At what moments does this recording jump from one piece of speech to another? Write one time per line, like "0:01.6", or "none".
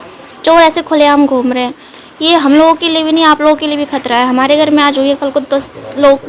none